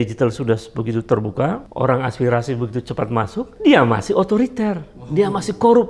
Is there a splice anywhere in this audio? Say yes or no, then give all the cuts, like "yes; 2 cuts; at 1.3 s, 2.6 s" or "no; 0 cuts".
yes; 2 cuts; at 1.6 s, 3.5 s